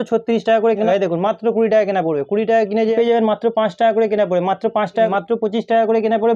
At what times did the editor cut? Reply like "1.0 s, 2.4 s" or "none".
0.9 s, 2.9 s, 5.1 s